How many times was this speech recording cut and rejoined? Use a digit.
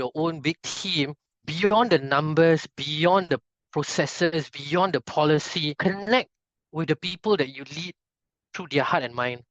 1